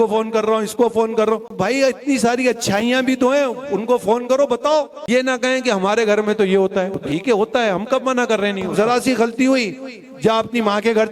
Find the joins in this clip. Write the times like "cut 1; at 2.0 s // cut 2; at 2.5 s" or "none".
cut 1; at 1.6 s // cut 2; at 5.0 s // cut 3; at 7.0 s // cut 4; at 8.7 s